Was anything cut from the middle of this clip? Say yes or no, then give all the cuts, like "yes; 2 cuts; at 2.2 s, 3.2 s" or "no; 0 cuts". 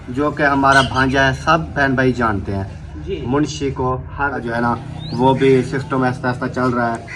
yes; 1 cut; at 4.4 s